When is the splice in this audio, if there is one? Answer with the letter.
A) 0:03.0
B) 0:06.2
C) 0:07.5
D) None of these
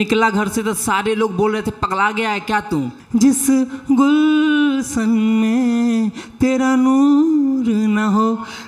A